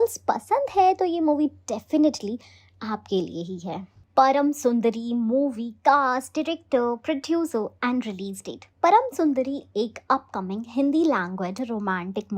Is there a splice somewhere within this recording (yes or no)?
yes